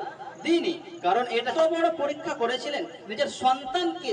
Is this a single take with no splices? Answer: no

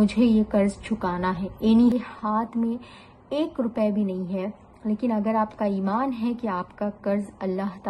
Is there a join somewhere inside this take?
yes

